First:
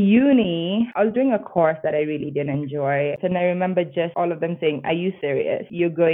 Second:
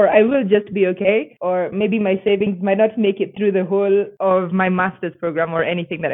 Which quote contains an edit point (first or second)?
first